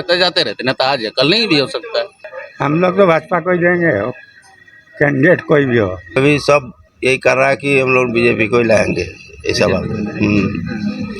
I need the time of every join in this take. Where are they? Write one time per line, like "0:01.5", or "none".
0:02.2
0:06.2

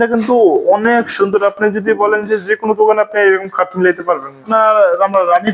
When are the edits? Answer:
0:04.5

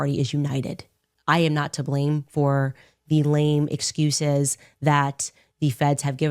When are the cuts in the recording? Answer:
0:01.1

